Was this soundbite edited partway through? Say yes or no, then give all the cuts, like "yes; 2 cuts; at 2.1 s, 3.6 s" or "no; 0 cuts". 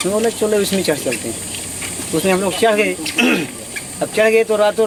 no; 0 cuts